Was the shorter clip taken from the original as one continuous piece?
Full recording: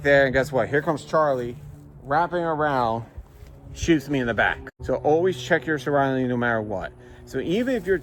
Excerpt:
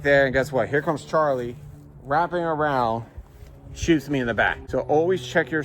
no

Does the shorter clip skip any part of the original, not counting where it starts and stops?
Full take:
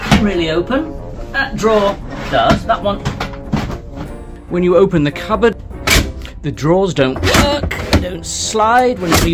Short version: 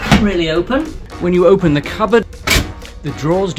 yes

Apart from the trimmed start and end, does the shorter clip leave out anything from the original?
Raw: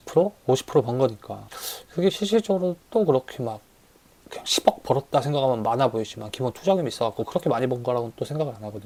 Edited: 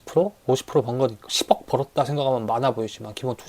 yes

